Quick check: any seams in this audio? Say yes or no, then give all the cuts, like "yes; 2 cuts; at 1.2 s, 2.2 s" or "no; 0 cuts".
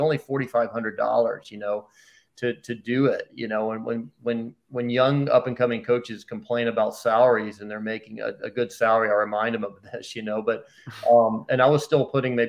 no; 0 cuts